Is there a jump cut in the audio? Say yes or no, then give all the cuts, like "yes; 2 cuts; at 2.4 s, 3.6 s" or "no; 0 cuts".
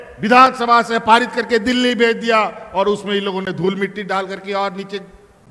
no; 0 cuts